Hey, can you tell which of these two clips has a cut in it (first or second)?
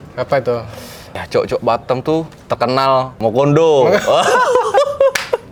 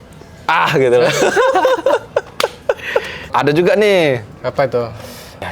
second